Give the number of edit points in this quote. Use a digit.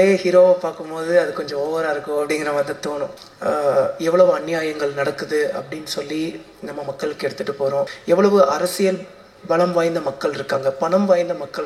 2